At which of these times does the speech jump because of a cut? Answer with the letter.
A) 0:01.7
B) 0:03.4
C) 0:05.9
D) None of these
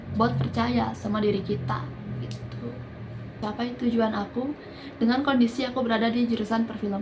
B